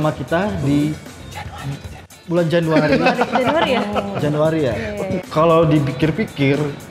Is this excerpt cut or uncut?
cut